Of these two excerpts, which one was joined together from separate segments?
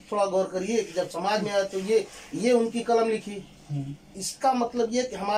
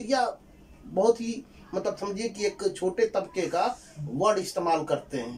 first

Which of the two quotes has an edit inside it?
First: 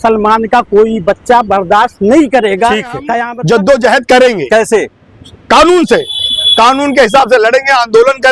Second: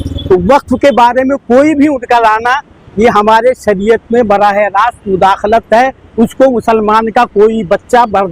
first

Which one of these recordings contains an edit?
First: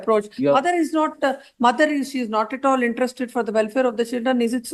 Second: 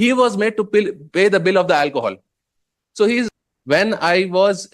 second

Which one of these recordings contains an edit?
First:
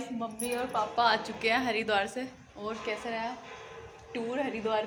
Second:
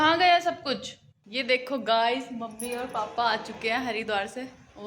second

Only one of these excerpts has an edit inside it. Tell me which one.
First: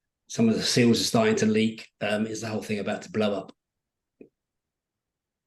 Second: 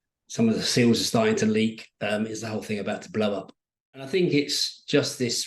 second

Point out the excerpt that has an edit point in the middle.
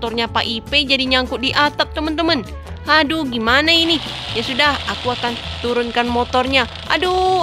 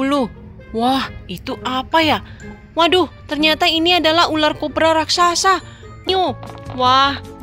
second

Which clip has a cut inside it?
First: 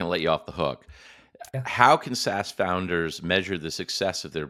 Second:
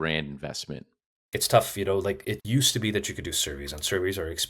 second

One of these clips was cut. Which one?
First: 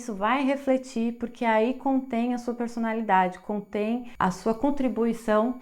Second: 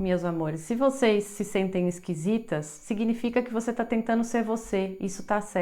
first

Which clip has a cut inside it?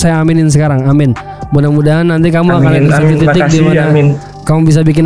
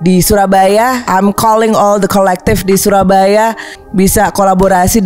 second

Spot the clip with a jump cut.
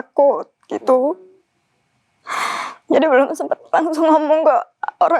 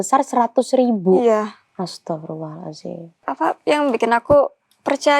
second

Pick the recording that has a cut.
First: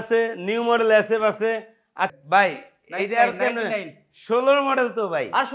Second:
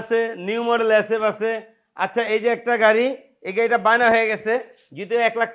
first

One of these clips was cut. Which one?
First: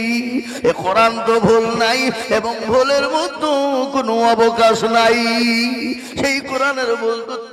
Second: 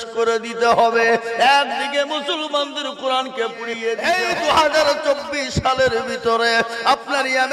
second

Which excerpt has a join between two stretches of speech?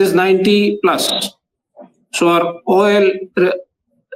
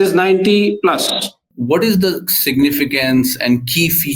second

